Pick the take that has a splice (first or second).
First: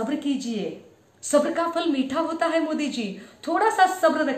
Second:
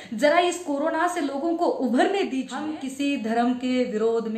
second